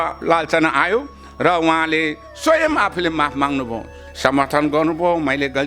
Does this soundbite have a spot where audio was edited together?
yes; 1 cut; at 4.0 s

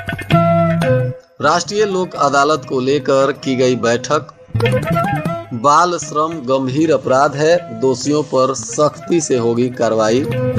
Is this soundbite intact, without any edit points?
no; 1 cut; at 1.2 s

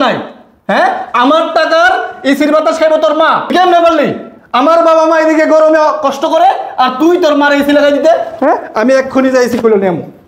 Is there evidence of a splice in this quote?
yes; 1 cut; at 3.5 s

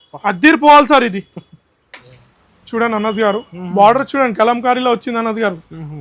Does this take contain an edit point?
yes; 1 cut; at 2.0 s

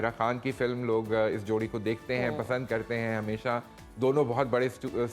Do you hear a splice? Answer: no; 0 cuts

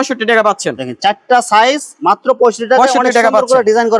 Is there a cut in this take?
no; 0 cuts

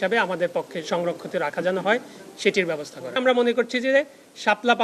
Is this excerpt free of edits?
no; 1 cut; at 3.2 s

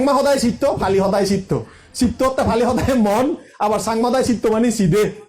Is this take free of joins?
yes; 0 cuts

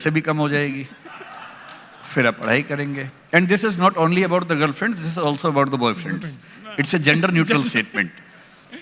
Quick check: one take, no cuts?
yes; 0 cuts

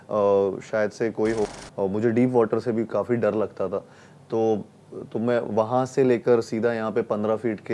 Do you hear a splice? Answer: yes; 1 cut; at 1.5 s

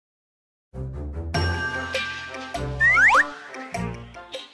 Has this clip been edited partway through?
no; 0 cuts

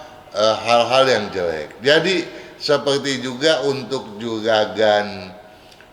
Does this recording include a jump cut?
no; 0 cuts

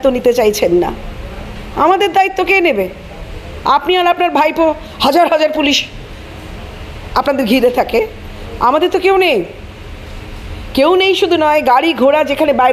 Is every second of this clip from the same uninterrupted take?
yes; 0 cuts

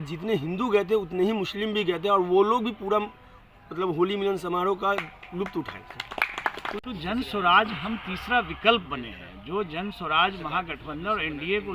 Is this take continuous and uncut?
no; 1 cut; at 6.8 s

